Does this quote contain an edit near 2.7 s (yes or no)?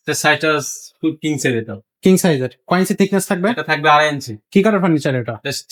no